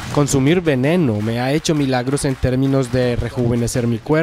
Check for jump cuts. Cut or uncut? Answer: uncut